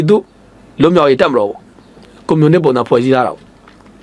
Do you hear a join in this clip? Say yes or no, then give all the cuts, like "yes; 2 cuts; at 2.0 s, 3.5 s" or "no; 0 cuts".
no; 0 cuts